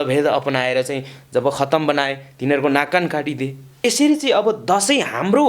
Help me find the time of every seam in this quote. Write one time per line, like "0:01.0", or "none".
0:03.8